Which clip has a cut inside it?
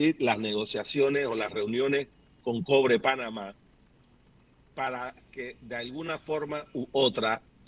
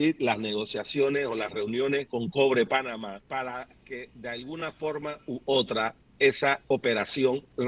second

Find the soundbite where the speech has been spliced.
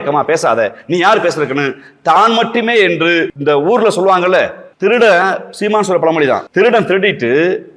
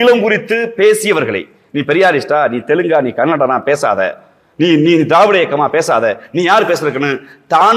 first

